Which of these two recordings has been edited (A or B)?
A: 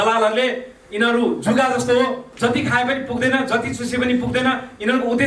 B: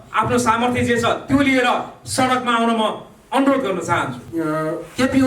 B